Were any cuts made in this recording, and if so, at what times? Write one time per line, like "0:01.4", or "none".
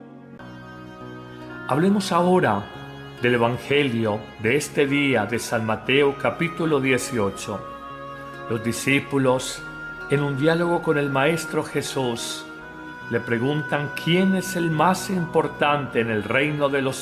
0:15.4